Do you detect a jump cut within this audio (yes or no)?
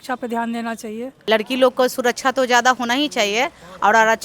yes